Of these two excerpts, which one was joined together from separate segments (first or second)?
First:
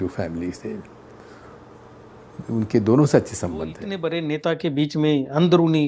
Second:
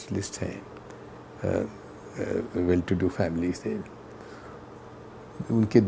first